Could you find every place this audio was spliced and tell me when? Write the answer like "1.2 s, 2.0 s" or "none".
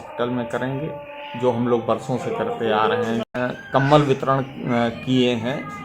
3.3 s